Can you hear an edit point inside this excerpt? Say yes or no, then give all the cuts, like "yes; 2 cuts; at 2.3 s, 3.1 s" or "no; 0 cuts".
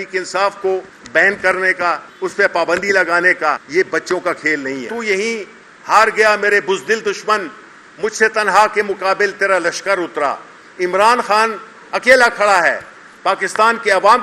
yes; 4 cuts; at 1.0 s, 2.1 s, 3.6 s, 4.9 s